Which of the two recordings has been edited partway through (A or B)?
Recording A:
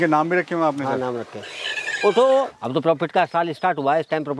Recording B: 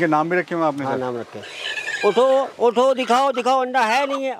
A